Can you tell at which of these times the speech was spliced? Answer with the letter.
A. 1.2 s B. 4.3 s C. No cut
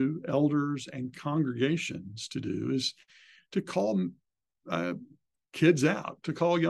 C